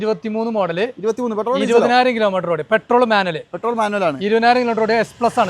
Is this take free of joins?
yes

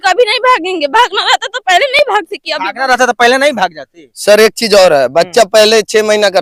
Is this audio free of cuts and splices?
yes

